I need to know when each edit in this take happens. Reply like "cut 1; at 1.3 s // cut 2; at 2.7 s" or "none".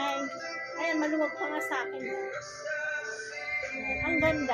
none